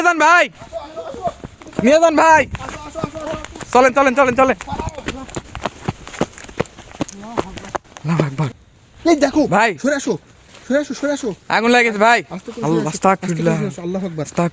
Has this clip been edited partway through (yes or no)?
yes